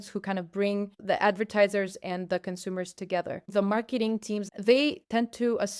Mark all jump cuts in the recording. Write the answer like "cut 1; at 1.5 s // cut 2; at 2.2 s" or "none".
cut 1; at 1.0 s // cut 2; at 3.5 s // cut 3; at 4.5 s